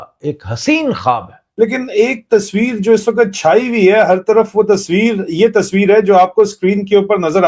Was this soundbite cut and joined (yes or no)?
yes